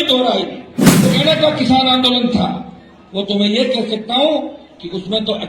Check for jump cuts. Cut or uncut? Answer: cut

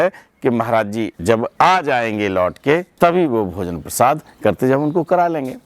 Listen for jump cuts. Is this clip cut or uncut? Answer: cut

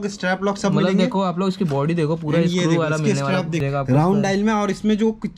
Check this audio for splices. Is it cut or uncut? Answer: cut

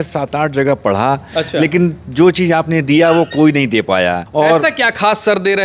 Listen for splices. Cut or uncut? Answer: uncut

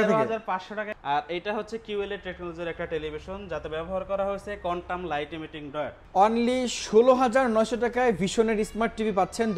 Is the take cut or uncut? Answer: cut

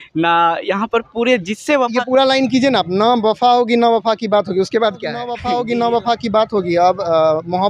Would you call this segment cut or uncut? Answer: cut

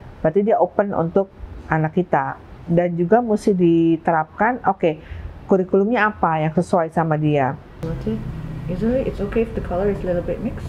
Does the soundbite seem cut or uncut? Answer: cut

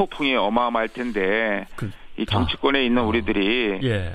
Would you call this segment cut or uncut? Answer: cut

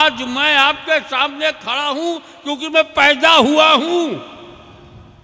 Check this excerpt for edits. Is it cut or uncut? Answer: uncut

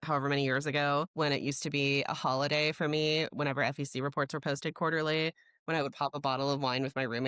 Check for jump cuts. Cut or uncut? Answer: cut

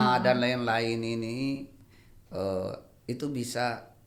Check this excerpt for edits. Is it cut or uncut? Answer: uncut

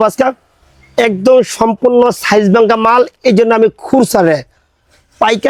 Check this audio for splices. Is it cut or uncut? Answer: uncut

